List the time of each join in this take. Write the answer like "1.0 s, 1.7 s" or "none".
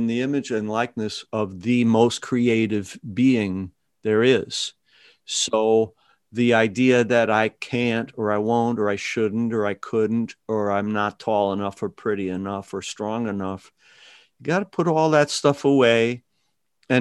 none